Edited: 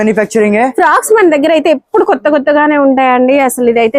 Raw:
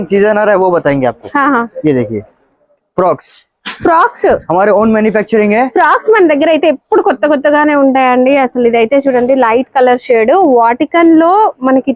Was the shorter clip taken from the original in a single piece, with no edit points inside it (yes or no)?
yes